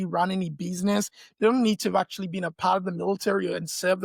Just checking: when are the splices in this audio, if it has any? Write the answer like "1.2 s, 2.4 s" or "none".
none